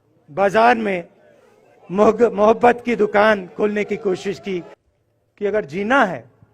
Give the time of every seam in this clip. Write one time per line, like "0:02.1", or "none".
0:04.9